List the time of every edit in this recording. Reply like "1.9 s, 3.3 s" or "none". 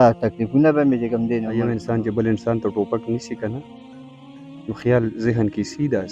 1.5 s